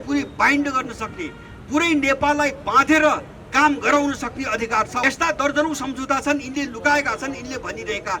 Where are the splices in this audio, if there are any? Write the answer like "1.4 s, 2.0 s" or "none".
4.9 s